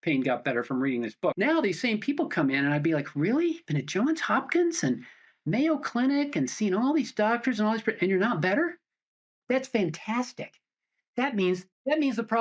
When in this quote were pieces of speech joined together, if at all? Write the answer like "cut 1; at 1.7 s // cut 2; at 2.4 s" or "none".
cut 1; at 1.4 s